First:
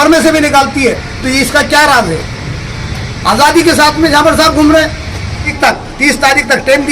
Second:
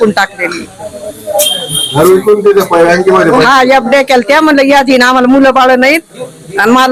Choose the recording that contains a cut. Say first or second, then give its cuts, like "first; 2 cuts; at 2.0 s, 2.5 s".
first; 1 cut; at 5.5 s